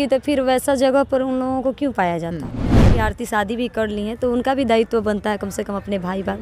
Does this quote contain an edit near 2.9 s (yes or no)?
yes